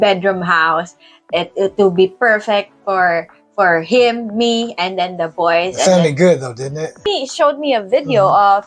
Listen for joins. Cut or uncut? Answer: cut